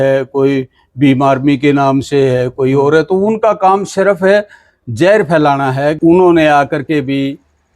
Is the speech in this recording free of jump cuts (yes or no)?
no